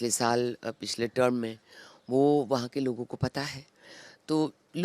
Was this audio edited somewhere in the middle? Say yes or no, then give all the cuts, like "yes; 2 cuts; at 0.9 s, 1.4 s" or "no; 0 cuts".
no; 0 cuts